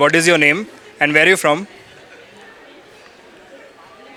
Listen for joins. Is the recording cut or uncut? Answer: uncut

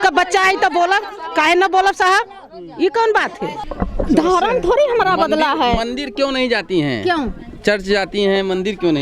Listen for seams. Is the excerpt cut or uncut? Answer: cut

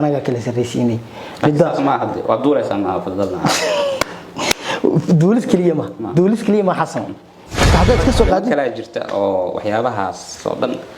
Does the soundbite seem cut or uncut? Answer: cut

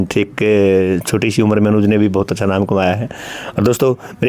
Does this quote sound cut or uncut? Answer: uncut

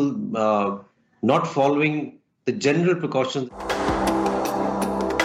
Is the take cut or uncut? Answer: cut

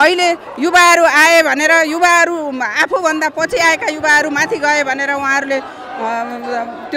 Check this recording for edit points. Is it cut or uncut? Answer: uncut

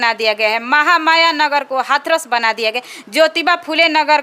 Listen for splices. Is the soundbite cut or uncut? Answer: uncut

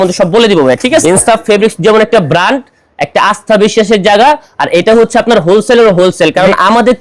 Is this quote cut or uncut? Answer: cut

